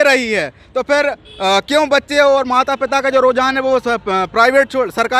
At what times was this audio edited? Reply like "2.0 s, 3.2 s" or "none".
none